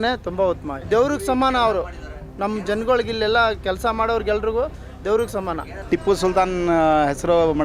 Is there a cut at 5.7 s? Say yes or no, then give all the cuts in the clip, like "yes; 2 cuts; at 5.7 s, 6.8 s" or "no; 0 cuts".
yes; 2 cuts; at 0.8 s, 5.7 s